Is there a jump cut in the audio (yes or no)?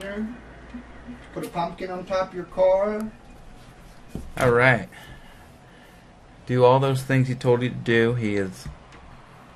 yes